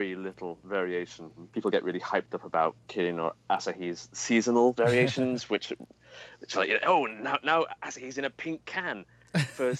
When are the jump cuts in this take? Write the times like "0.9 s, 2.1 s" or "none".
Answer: 1.4 s